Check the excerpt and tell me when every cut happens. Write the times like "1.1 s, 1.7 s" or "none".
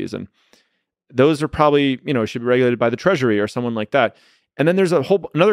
none